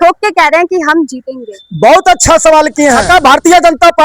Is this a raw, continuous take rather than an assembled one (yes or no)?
no